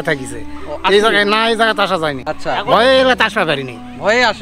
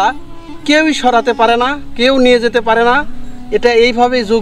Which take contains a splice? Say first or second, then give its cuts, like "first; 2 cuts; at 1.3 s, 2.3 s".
first; 1 cut; at 2.3 s